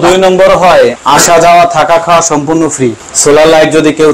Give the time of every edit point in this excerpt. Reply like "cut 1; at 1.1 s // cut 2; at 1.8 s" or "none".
cut 1; at 1.0 s // cut 2; at 3.1 s